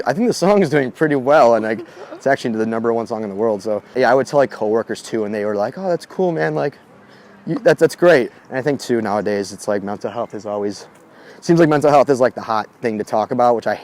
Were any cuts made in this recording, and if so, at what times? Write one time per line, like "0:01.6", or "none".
0:08.3